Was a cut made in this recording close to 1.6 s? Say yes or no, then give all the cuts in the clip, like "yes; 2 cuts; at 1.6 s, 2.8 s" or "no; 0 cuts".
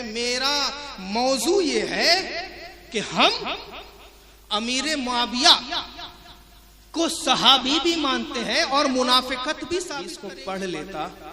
no; 1 cut; at 10.0 s